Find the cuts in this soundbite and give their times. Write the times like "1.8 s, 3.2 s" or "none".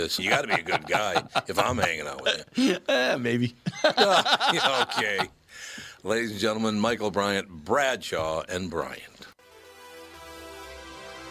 none